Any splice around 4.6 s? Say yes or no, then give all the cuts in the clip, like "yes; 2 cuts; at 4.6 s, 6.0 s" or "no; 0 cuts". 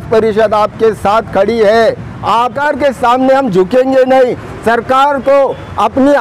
no; 1 cut; at 2.5 s